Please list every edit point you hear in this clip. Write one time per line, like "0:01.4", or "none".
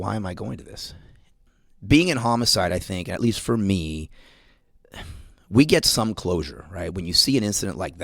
0:01.2